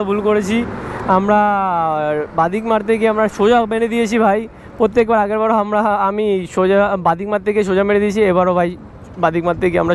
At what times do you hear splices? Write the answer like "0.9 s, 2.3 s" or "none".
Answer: none